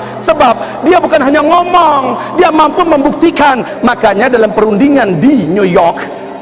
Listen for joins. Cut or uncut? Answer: cut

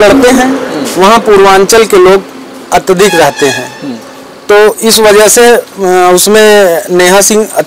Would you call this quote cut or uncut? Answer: uncut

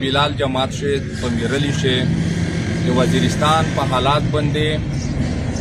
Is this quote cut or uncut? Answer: uncut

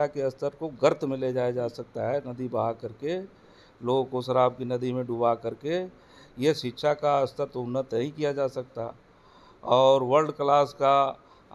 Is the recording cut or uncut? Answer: uncut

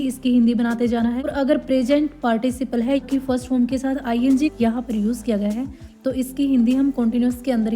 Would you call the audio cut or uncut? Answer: cut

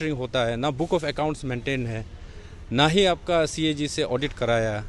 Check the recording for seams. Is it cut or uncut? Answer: uncut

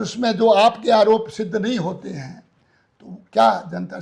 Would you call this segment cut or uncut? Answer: uncut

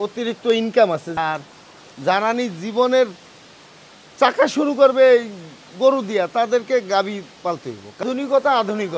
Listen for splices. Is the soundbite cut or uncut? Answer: cut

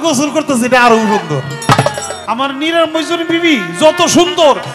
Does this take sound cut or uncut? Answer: cut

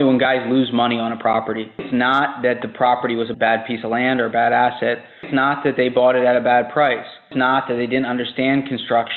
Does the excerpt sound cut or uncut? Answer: cut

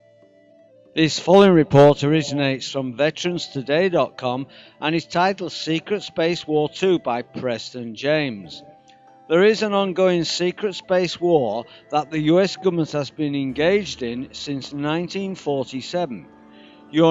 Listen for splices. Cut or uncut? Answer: cut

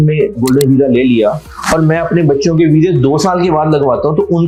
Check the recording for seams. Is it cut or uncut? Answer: uncut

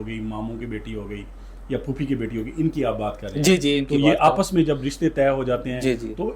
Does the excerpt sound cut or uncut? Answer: uncut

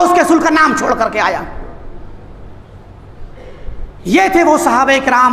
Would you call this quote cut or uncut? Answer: uncut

